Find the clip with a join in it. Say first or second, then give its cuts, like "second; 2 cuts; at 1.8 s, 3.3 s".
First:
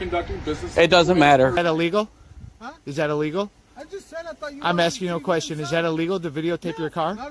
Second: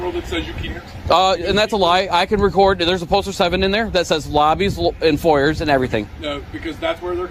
first; 1 cut; at 1.6 s